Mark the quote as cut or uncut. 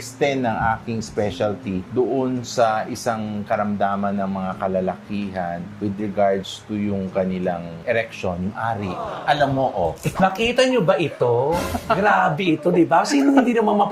cut